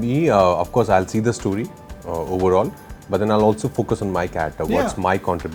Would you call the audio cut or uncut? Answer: uncut